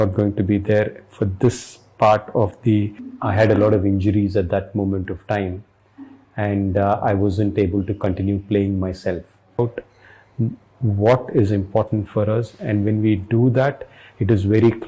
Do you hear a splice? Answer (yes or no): yes